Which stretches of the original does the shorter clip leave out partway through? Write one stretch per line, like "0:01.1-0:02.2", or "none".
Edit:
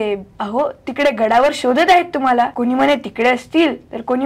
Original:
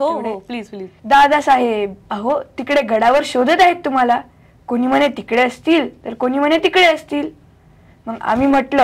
0:04.2-0:04.7